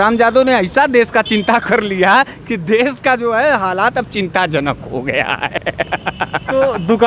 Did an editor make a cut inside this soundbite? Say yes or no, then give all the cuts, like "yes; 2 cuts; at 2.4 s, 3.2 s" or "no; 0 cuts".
no; 0 cuts